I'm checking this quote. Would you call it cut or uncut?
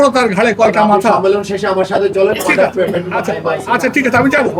uncut